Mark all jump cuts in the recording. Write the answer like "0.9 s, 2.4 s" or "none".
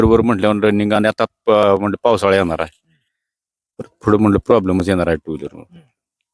none